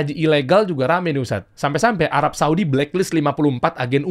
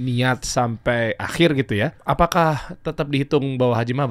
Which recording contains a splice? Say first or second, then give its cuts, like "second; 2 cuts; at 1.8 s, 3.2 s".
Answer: second; 1 cut; at 2.0 s